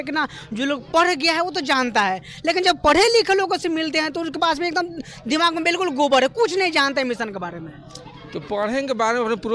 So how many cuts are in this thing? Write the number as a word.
zero